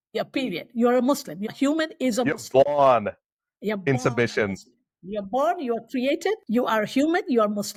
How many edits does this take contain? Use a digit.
0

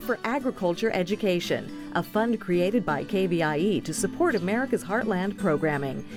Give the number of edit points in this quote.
0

